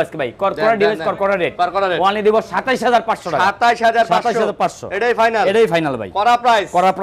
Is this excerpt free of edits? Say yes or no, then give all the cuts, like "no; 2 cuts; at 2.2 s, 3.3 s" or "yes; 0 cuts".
yes; 0 cuts